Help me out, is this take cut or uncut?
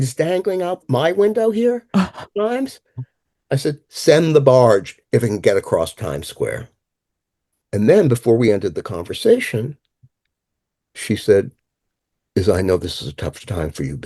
uncut